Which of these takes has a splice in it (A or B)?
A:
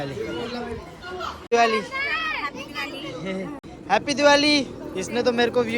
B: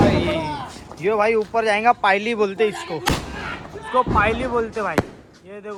A